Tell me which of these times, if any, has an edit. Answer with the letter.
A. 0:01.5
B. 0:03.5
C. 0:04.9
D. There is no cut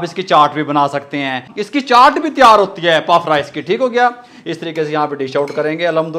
A